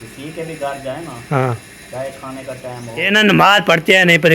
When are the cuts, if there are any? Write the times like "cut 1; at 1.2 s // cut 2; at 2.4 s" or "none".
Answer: cut 1; at 3.0 s